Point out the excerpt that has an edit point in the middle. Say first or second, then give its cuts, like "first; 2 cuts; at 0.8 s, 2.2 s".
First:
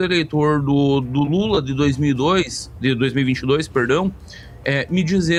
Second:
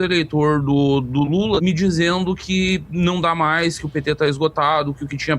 second; 1 cut; at 1.6 s